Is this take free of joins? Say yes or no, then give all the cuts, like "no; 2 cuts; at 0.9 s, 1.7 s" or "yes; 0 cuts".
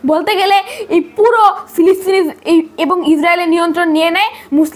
yes; 0 cuts